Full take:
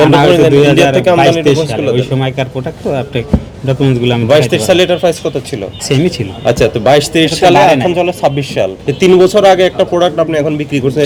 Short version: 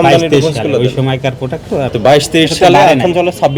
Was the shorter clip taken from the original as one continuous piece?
no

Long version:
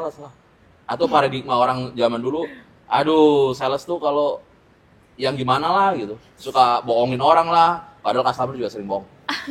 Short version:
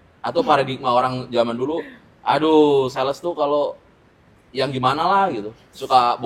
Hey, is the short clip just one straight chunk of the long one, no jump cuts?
yes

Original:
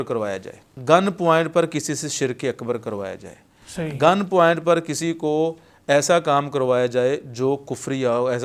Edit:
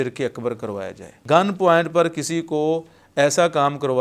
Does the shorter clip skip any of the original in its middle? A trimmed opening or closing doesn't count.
yes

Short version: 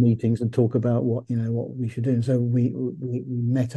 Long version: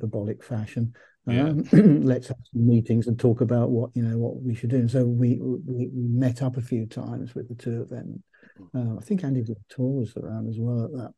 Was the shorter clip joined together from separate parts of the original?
no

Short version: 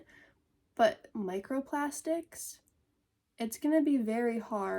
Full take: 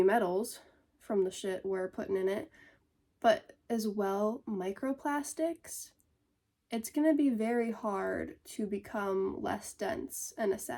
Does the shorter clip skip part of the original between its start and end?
yes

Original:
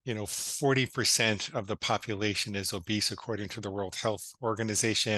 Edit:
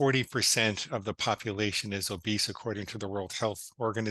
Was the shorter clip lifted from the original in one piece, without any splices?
yes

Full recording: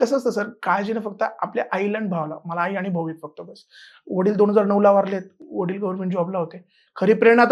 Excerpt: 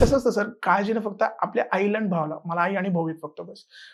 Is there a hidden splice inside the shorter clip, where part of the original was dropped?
no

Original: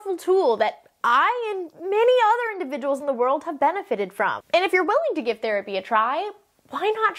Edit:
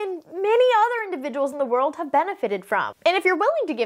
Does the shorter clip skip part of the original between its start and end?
no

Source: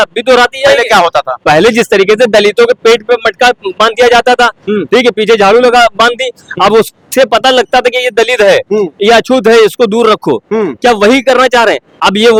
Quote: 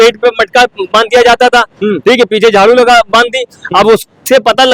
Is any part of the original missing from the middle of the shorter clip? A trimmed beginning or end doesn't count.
no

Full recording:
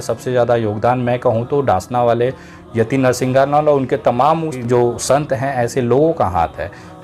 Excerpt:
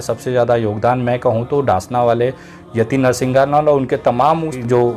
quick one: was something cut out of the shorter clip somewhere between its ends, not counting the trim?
no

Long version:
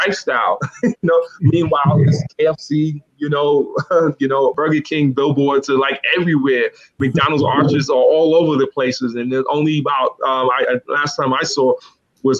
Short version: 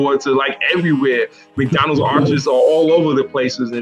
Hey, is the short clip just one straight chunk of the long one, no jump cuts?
yes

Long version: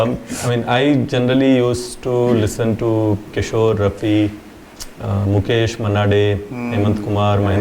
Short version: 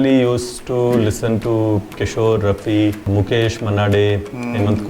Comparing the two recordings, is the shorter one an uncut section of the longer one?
no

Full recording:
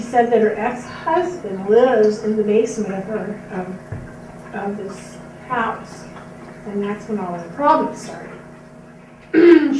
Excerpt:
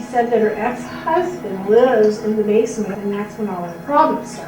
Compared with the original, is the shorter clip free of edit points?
no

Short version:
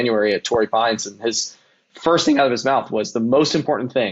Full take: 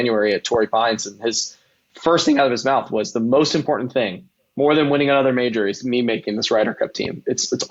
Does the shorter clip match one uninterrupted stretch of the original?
yes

